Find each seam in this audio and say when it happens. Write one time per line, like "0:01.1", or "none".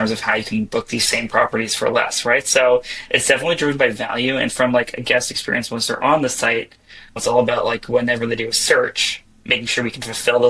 0:07.2

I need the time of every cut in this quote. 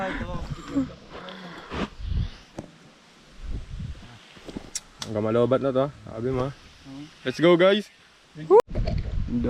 0:08.6

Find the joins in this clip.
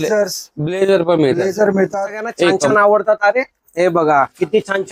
0:02.6

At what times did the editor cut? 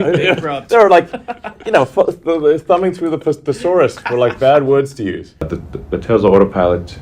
0:05.4

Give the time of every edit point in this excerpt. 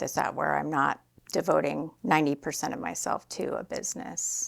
0:01.1
0:01.9

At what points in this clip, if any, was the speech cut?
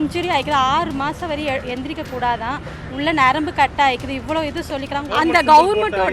0:05.1

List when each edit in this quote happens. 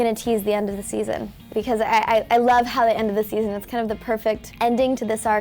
0:01.5
0:04.5

